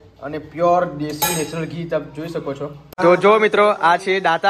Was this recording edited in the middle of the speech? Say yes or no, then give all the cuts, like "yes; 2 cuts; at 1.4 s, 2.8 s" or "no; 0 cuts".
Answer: yes; 1 cut; at 2.9 s